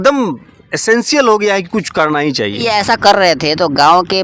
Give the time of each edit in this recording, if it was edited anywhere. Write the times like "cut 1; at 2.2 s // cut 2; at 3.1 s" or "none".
cut 1; at 2.6 s